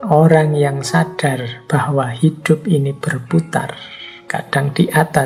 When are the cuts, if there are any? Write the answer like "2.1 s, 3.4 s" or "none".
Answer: none